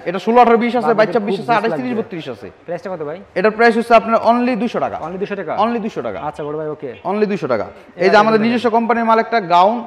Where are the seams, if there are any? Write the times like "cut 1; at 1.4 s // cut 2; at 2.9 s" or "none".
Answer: none